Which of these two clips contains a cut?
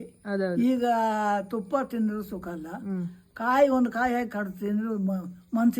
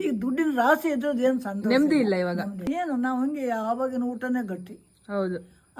second; 1 cut; at 2.6 s

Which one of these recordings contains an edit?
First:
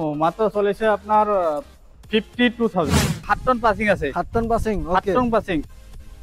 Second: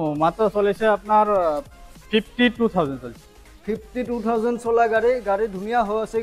first; 1 cut; at 3.3 s

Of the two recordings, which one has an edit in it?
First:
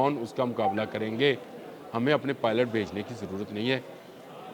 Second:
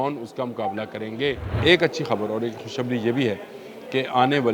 second; 1 cut; at 1.5 s

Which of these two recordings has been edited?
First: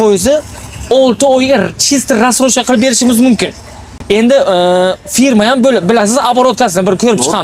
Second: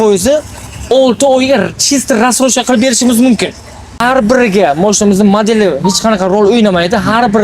second; 1 cut; at 4.0 s

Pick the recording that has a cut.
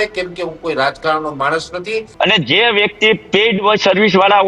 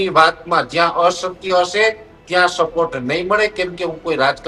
first; 1 cut; at 2.1 s

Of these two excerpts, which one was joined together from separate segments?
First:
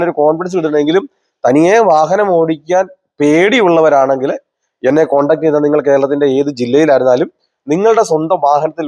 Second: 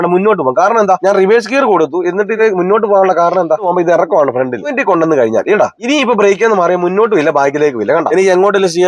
second; 6 cuts; at 1.0 s, 2.4 s, 3.7 s, 4.8 s, 5.8 s, 8.1 s

